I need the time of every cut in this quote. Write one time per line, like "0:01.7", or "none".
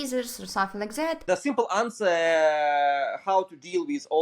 0:01.3